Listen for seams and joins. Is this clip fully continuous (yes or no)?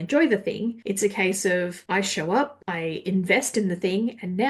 no